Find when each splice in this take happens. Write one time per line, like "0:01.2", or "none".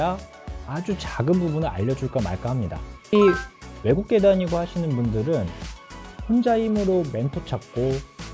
0:03.1